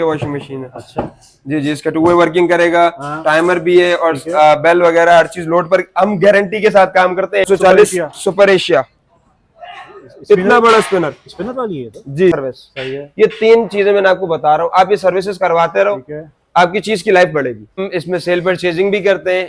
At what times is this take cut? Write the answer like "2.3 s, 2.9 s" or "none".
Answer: 7.5 s, 12.4 s, 17.8 s